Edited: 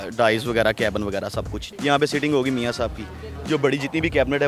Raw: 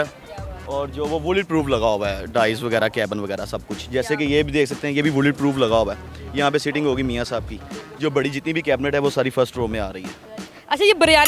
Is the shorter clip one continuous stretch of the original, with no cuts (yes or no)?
no